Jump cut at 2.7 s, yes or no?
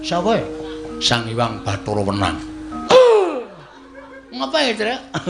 yes